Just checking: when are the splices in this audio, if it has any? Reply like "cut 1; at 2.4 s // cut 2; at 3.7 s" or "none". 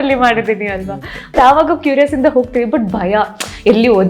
cut 1; at 1.3 s